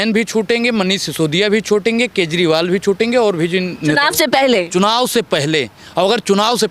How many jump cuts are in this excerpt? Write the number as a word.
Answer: zero